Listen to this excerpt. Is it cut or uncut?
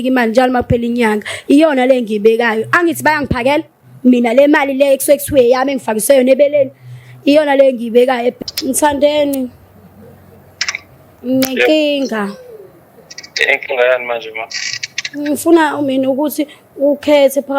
cut